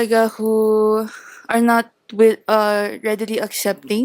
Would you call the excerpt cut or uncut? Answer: uncut